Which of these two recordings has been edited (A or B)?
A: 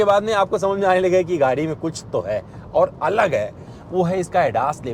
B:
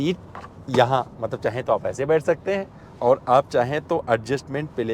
A